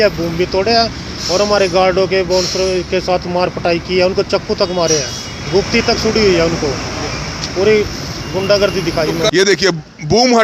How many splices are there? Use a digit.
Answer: 1